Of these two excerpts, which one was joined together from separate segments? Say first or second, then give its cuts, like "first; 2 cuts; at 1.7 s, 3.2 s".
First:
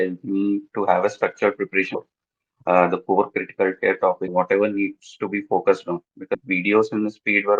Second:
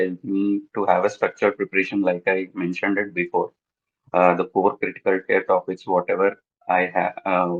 first; 3 cuts; at 1.9 s, 4.3 s, 6.4 s